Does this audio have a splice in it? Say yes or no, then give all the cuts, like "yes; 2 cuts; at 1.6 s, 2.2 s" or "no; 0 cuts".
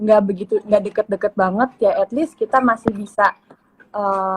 no; 0 cuts